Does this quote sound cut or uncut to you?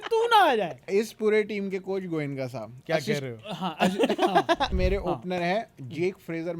cut